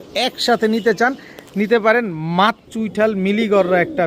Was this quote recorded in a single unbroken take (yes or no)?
no